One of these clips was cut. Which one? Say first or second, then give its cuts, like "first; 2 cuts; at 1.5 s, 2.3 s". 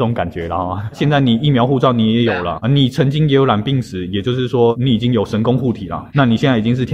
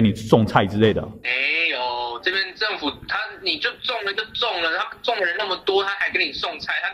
first; 4 cuts; at 1.0 s, 2.5 s, 4.7 s, 5.9 s